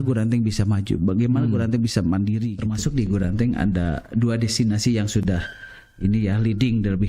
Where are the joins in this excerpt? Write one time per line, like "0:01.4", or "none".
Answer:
0:02.6